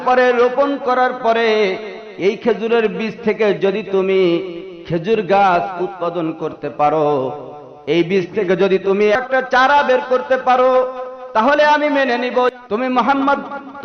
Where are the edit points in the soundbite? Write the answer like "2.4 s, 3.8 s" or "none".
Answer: 9.2 s, 12.5 s

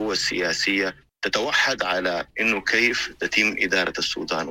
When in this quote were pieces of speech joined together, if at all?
1.1 s

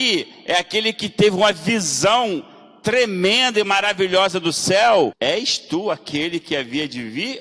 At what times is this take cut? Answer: 5.2 s

